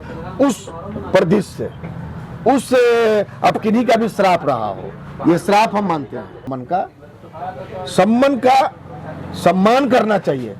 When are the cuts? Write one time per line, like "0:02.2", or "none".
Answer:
0:06.5